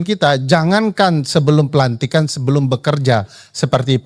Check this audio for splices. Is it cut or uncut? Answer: uncut